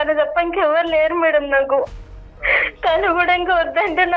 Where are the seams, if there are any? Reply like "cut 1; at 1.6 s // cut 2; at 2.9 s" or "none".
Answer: cut 1; at 2.0 s